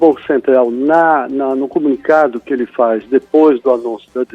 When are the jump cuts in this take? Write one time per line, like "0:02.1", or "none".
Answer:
none